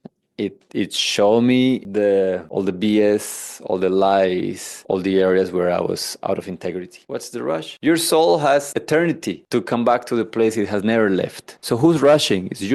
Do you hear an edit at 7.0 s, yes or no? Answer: yes